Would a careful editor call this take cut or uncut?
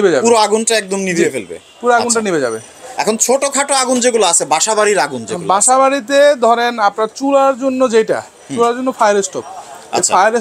uncut